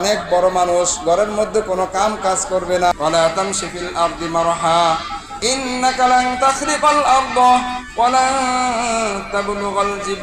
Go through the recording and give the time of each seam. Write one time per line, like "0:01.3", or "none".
0:02.9